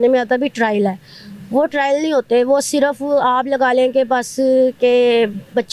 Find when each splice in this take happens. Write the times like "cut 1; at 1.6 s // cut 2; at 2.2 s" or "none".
none